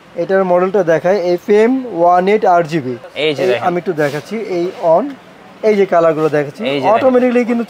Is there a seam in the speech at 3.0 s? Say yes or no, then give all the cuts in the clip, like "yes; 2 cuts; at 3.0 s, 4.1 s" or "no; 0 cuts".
yes; 1 cut; at 3.0 s